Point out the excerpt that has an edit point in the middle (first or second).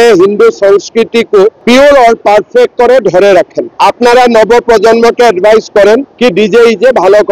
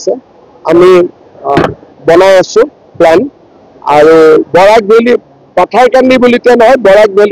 first